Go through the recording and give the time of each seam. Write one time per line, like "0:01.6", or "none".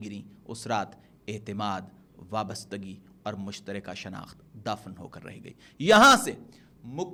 none